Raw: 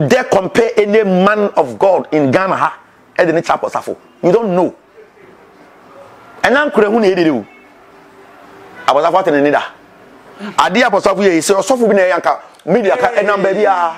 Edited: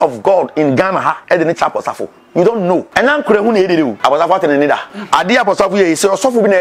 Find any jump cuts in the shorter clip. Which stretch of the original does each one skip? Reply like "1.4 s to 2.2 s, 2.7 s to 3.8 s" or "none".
2.8 s to 3.1 s, 4.7 s to 6.3 s, 7.4 s to 8.8 s, 9.8 s to 10.4 s